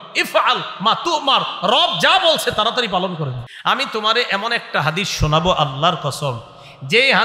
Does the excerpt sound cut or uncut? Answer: cut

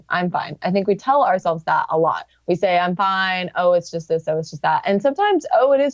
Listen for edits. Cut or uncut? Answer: cut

